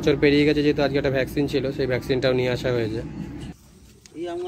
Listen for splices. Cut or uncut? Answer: cut